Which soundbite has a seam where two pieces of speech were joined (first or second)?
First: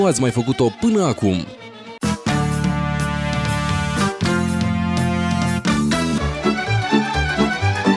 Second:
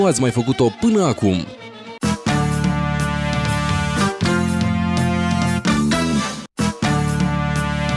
second